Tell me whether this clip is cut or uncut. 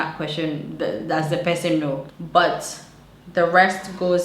cut